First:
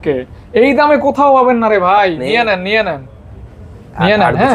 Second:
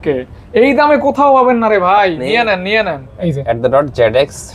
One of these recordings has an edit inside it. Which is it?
second; 1 cut; at 3.3 s

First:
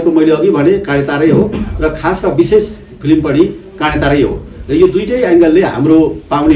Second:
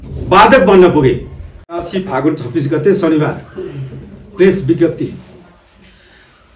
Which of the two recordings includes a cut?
second; 1 cut; at 1.9 s

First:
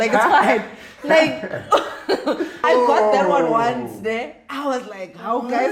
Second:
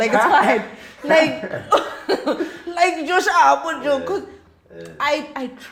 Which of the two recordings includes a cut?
first; 1 cut; at 2.6 s

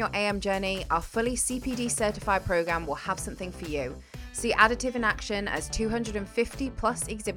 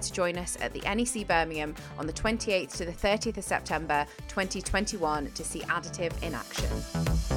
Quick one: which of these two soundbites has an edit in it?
second; 1 cut; at 6.4 s

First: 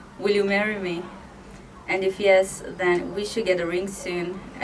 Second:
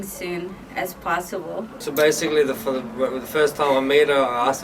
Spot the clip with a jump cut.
second; 1 cut; at 1.7 s

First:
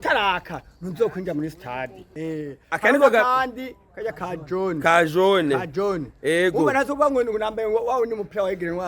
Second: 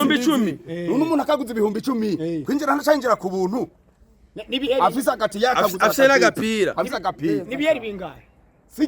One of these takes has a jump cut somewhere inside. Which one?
first; 1 cut; at 2.0 s

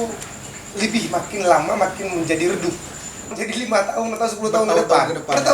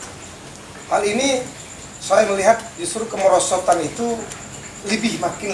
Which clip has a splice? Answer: first; 1 cut; at 3.4 s

